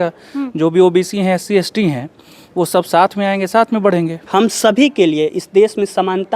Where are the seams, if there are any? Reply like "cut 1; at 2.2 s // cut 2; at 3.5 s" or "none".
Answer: cut 1; at 4.2 s